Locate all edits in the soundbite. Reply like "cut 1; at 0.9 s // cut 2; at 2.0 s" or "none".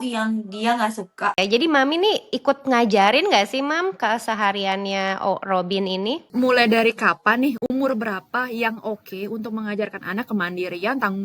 cut 1; at 1.4 s // cut 2; at 6.3 s